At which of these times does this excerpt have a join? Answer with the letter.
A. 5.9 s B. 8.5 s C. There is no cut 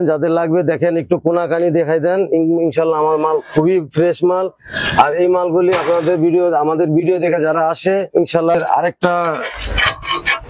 B